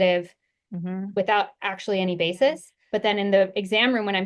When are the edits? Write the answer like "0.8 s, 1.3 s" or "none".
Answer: 2.7 s